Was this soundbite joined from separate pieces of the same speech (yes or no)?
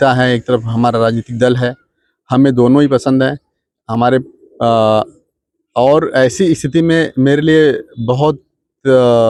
no